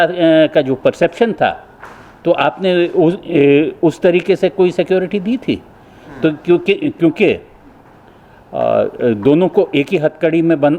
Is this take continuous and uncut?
yes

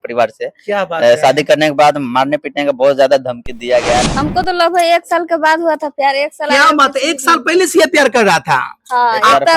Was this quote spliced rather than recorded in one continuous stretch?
yes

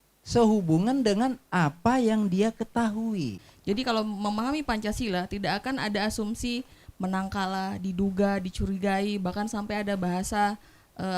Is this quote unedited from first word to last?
no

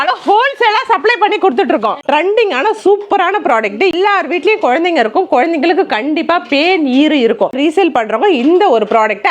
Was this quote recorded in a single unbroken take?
no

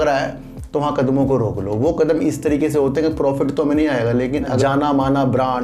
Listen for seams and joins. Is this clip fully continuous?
no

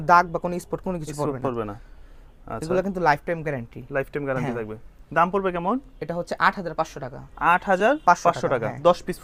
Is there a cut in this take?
no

